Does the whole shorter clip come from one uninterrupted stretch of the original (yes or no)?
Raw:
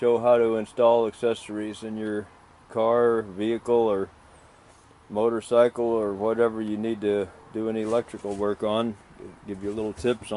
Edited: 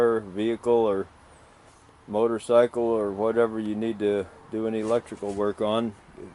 yes